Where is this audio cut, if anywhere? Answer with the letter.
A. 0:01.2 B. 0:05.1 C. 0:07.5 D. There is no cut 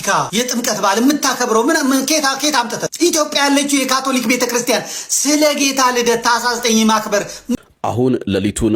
C